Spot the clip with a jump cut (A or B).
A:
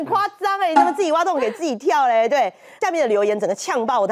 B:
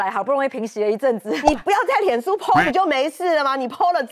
A